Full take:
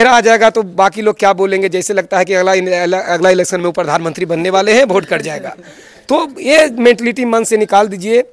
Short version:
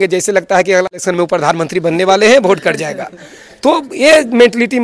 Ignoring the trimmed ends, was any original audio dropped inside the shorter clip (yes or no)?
yes